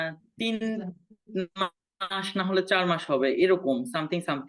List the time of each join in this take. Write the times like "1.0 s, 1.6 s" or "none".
none